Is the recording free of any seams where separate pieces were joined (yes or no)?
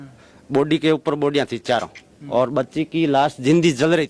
yes